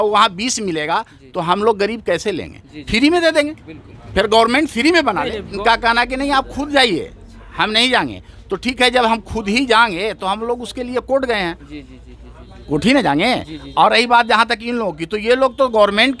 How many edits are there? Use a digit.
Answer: 1